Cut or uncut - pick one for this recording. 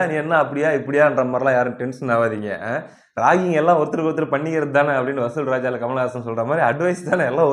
uncut